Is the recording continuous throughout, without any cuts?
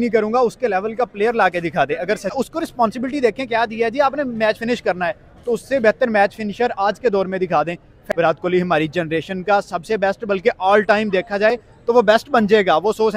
no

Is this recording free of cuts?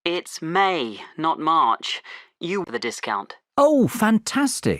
no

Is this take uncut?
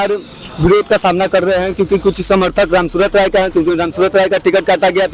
yes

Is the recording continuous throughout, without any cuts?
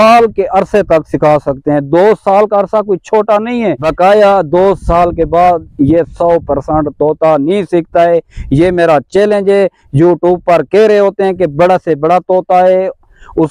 no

